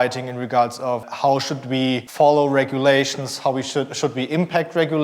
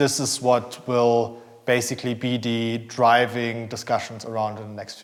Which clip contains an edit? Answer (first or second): first